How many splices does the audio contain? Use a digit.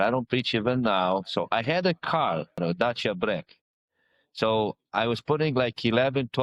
1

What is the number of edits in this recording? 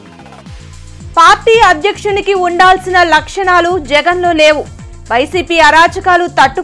1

